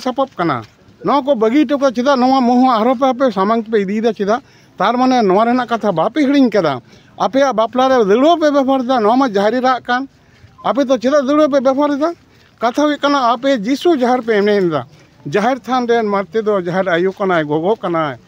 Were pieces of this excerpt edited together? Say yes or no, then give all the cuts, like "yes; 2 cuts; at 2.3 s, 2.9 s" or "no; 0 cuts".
no; 0 cuts